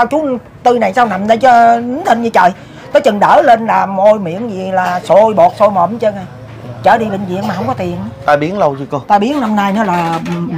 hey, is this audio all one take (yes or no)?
yes